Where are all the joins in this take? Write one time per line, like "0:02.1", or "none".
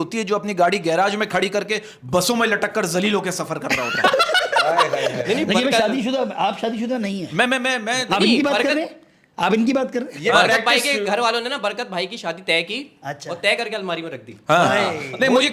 none